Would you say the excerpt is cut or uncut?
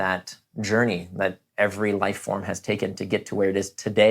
uncut